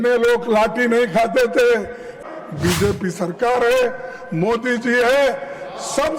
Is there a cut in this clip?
yes; 1 cut; at 2.2 s

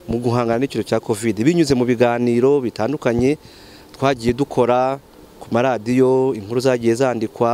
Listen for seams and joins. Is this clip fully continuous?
yes; 0 cuts

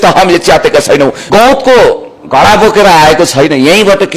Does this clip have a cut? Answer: yes; 1 cut; at 1.2 s

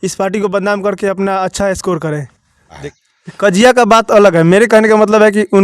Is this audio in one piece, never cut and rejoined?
no; 1 cut; at 2.9 s

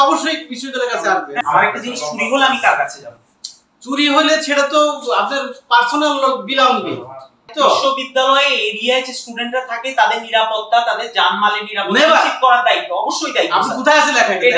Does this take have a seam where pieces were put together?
yes; 2 cuts; at 1.4 s, 7.5 s

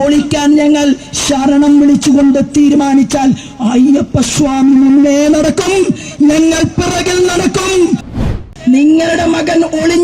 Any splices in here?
yes; 1 cut; at 8.2 s

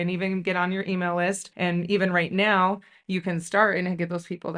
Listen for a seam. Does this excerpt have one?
no; 0 cuts

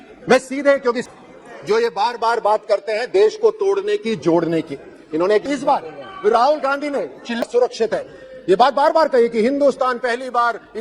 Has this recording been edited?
yes; 3 cuts; at 1.1 s, 5.4 s, 7.4 s

